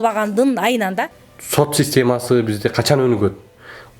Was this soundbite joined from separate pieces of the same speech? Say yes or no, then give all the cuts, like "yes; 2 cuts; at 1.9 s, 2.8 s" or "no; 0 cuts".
yes; 1 cut; at 1.2 s